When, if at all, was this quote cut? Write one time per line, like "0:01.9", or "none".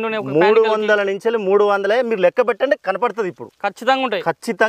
none